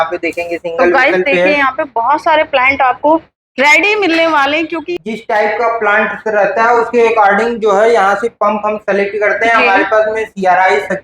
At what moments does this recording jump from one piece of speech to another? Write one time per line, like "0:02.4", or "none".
0:05.0

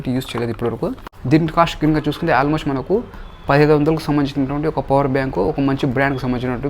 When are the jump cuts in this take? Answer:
0:01.1

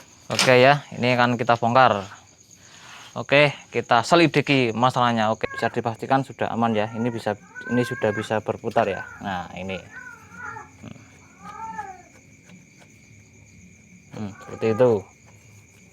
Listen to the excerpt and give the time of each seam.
0:05.4

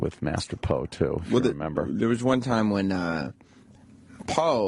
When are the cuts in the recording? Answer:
0:02.4

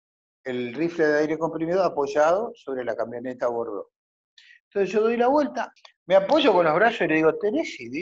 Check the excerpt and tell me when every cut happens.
0:05.7

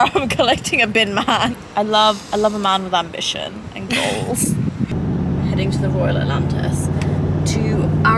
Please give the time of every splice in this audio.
0:01.6
0:04.9

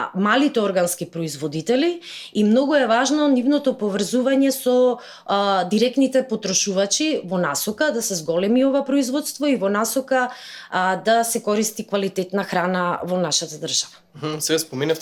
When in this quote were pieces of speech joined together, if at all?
none

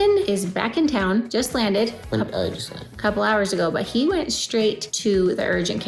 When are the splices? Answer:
none

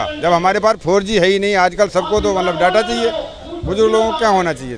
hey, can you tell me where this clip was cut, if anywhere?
0:03.2

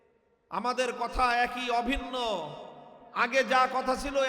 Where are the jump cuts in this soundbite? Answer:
none

